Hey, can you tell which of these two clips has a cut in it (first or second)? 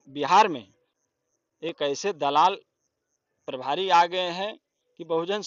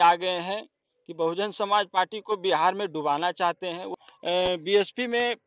second